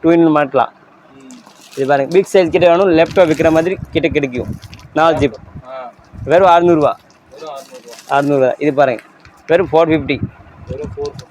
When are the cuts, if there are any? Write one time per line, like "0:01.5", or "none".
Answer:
none

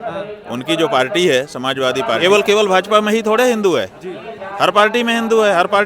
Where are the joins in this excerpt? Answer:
0:02.2

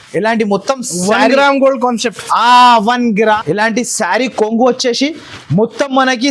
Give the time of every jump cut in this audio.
0:03.4

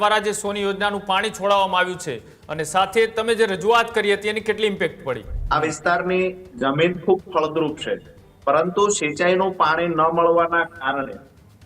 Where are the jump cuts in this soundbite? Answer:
0:05.3

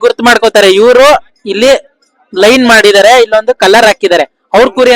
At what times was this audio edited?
none

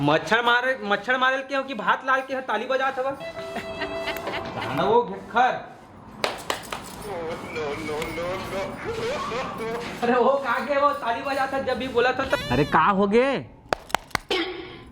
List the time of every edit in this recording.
0:12.4

